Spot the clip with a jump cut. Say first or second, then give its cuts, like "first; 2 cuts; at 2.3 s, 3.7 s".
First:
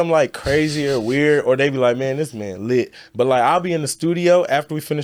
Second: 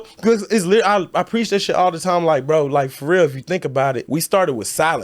second; 1 cut; at 4.0 s